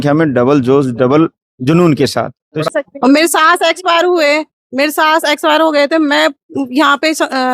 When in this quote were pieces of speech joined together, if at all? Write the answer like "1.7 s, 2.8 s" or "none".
2.7 s